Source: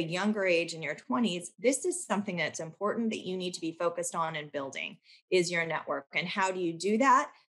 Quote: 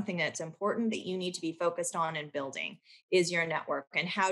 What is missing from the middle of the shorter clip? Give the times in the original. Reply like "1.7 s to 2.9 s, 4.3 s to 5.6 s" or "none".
none

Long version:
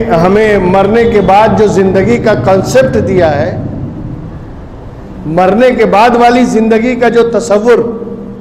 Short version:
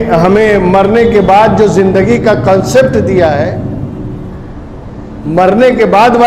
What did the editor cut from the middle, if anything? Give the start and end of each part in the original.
none

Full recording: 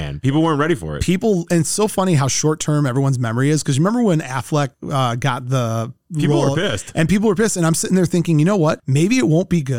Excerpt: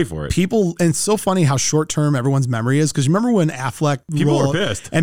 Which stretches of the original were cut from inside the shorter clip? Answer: 4.8 s to 6.1 s

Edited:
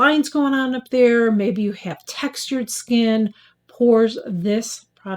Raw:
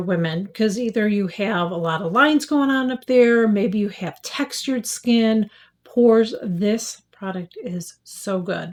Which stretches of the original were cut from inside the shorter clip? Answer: none

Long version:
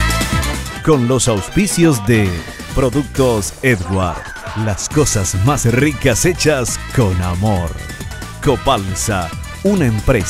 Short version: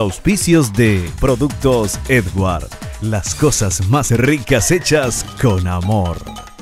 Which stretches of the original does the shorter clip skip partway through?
2.4 s to 2.6 s

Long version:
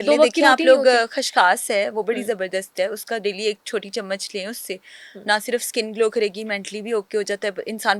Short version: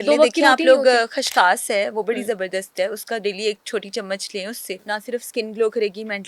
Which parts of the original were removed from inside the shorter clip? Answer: 4.8 s to 5.2 s

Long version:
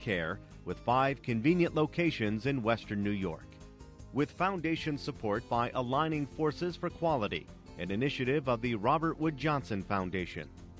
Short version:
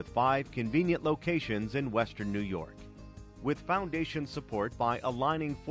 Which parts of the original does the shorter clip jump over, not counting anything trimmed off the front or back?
none

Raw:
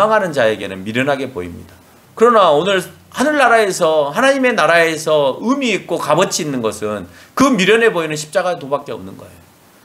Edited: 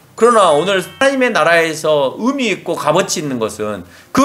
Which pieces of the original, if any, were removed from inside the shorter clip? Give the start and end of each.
2.9 s to 4.2 s

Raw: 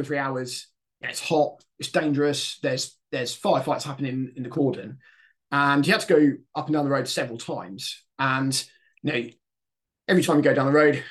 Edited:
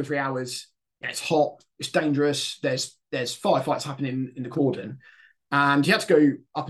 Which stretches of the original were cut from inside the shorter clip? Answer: none

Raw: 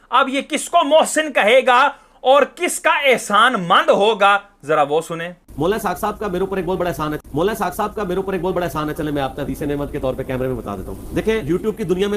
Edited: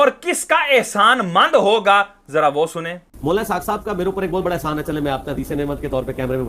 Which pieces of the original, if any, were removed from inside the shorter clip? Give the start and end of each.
6.8 s to 8.6 s

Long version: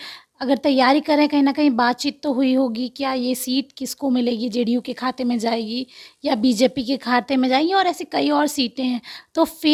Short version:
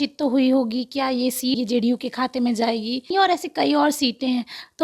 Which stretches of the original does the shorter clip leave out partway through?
3.6 s to 4.4 s, 6.0 s to 7.7 s

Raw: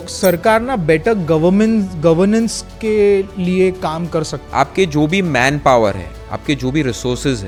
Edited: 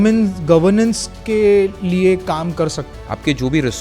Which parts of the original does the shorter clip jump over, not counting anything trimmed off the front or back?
4.4 s to 6.1 s

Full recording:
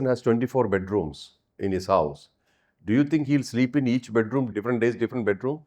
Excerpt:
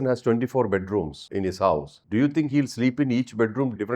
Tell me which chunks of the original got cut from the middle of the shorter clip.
1.2 s to 1.5 s, 2.2 s to 2.7 s

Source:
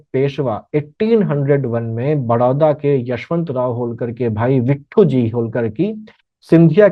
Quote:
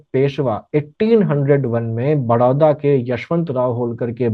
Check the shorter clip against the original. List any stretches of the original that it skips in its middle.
none

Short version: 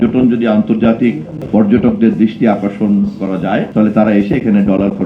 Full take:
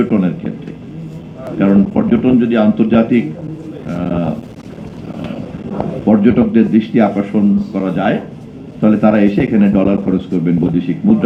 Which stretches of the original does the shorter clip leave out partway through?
3.5 s to 5.9 s, 8.2 s to 8.7 s

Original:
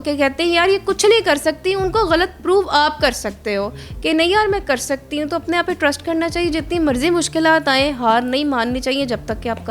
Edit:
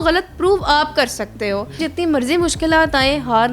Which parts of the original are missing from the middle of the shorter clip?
3.9 s to 6.5 s

